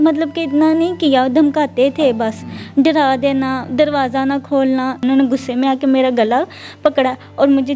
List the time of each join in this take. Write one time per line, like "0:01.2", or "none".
0:05.0